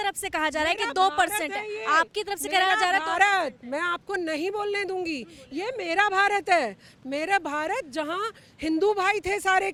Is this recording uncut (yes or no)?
yes